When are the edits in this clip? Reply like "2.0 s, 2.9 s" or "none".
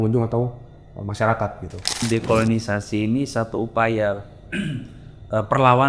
2.0 s